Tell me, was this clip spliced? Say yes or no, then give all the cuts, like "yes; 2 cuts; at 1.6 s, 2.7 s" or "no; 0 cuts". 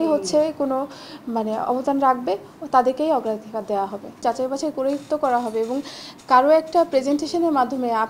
no; 0 cuts